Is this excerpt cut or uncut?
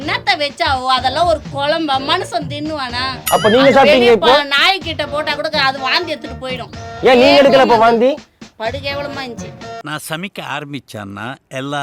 uncut